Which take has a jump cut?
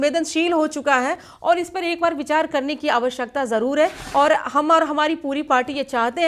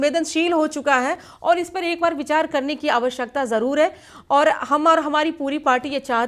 first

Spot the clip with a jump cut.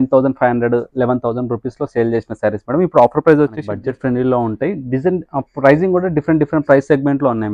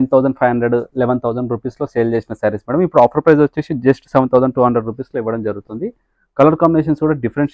first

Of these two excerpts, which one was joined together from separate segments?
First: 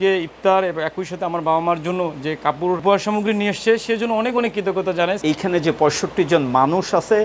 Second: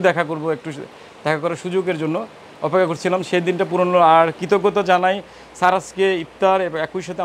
first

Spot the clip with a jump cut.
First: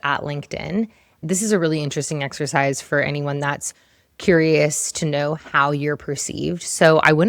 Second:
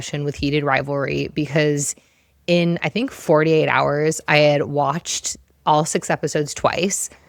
first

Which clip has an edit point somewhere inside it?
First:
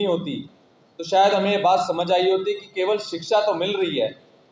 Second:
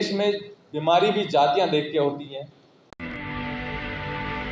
second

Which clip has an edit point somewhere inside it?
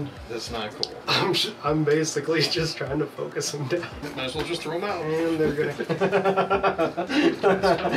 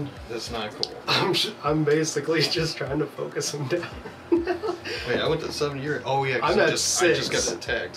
first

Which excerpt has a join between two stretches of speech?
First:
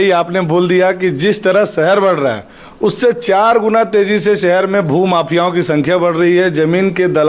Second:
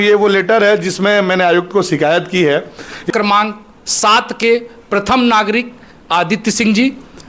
second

